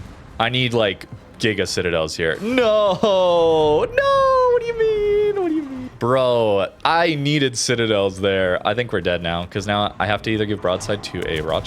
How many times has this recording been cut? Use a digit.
1